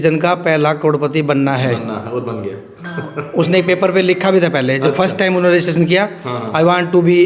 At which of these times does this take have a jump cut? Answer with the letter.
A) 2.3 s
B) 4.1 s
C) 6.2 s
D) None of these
D